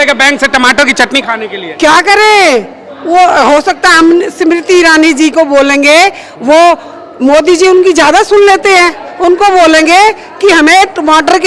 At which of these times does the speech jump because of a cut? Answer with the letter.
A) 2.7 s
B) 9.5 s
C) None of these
C